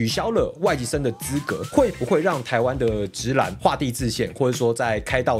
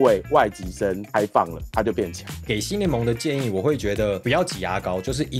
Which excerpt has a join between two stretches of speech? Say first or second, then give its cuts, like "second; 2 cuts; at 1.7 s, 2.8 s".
second; 1 cut; at 2.4 s